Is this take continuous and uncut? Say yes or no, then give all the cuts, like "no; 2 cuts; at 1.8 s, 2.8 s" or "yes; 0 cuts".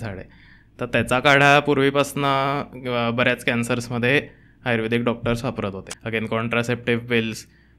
no; 1 cut; at 5.9 s